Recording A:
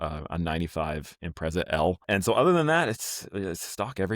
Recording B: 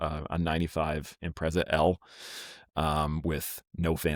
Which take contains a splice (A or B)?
A